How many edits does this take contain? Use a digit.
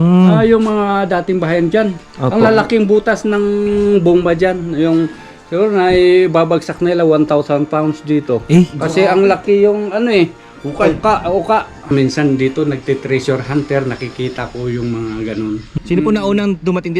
1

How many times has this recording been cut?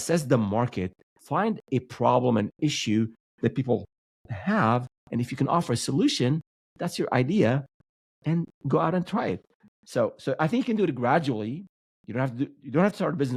0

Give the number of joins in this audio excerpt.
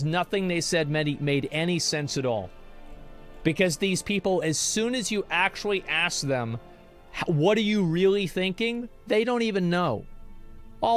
0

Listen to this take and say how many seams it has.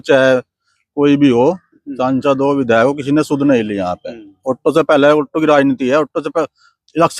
0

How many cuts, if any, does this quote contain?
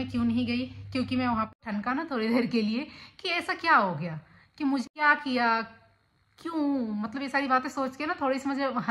2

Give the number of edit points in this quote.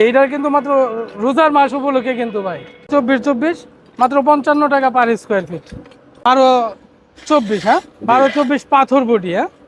2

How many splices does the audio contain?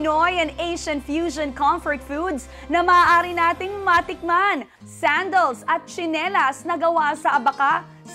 1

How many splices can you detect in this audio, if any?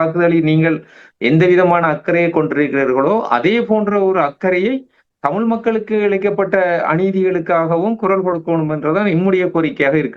0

